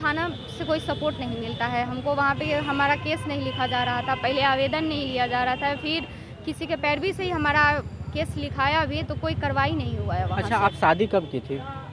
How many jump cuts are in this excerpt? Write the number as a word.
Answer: zero